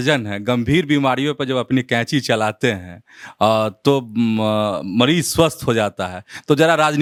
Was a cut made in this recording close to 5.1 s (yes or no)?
no